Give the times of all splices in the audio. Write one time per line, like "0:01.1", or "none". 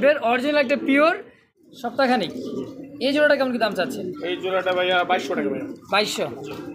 0:01.4